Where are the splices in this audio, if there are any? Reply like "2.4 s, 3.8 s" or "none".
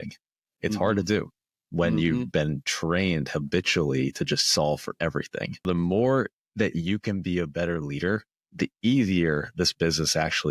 5.7 s, 8.4 s